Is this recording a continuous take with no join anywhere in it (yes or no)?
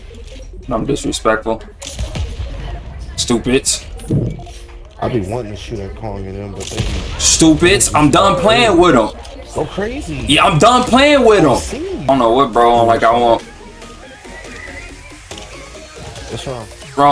no